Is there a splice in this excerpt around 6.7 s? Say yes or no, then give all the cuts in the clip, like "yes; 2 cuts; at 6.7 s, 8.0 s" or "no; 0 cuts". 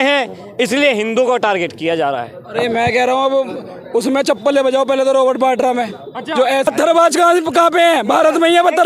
yes; 1 cut; at 6.7 s